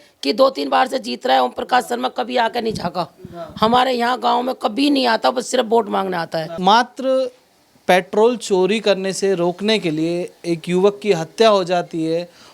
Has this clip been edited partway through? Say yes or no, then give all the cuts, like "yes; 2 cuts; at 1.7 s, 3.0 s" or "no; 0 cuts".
yes; 1 cut; at 6.5 s